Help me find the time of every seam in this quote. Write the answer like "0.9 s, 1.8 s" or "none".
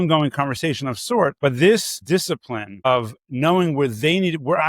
1.4 s